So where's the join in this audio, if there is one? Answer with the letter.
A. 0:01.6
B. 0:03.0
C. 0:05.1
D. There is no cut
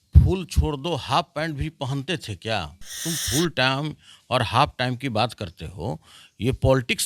B